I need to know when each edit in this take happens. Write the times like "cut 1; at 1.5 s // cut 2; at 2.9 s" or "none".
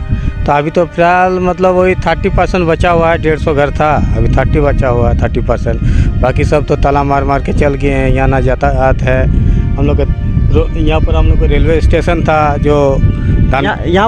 none